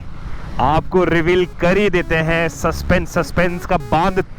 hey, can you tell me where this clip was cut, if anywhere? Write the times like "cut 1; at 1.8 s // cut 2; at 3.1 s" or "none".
none